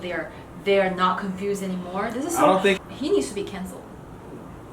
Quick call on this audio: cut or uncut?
cut